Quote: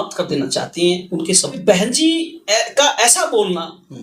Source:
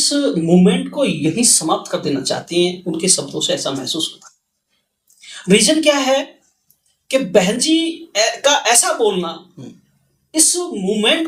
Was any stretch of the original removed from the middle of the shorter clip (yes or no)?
yes